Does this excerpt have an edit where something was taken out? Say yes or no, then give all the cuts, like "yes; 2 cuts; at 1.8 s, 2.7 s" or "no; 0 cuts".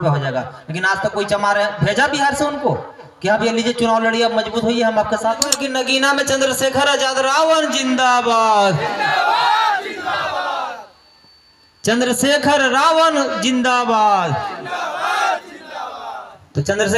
yes; 1 cut; at 5.6 s